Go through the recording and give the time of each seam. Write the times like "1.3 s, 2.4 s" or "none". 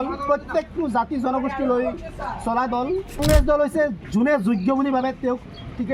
3.2 s